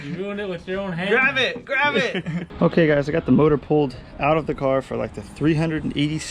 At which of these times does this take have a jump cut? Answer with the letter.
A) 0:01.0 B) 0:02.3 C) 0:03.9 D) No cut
B